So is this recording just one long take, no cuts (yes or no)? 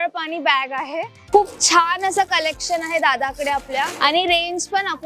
no